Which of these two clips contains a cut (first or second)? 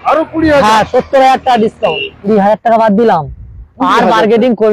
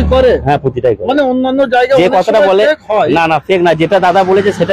first